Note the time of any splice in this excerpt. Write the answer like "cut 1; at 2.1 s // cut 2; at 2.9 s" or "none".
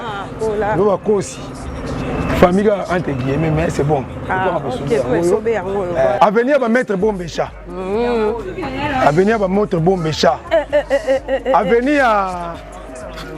cut 1; at 6.2 s